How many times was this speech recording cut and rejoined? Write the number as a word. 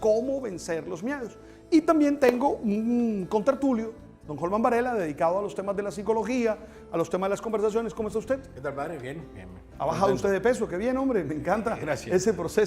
one